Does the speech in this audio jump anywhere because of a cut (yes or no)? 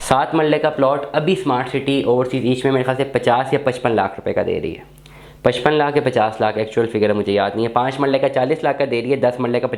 no